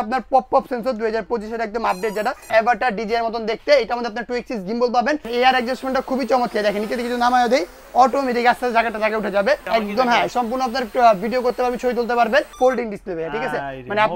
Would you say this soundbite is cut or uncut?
cut